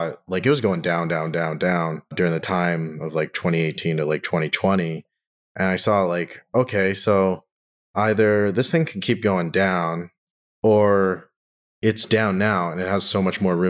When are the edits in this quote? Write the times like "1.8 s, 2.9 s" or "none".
none